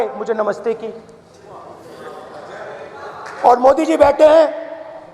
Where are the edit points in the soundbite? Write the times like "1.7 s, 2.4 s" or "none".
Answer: none